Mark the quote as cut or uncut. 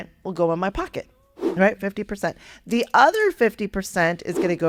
uncut